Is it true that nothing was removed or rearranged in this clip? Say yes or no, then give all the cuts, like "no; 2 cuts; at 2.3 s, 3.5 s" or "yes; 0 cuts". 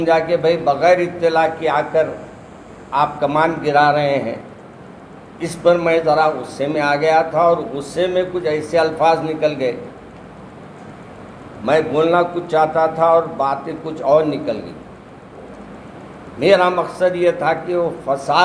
yes; 0 cuts